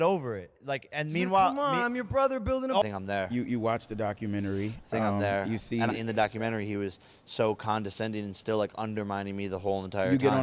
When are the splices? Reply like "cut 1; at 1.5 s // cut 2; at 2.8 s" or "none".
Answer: cut 1; at 2.8 s